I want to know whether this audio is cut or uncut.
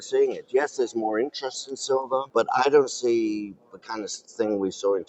cut